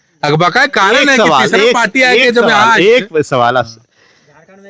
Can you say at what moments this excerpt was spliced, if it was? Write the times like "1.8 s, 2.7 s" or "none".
none